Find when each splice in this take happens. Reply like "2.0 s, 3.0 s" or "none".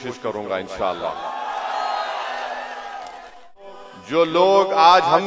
3.6 s